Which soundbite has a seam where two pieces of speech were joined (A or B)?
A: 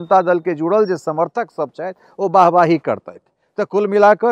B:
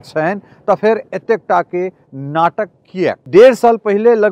B